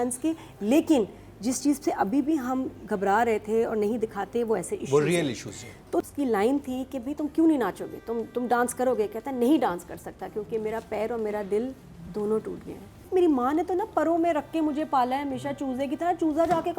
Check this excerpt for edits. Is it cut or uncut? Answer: cut